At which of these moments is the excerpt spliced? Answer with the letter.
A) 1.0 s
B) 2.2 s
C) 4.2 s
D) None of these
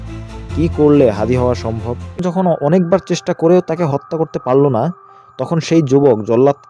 B